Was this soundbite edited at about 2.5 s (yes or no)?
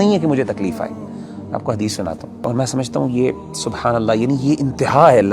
yes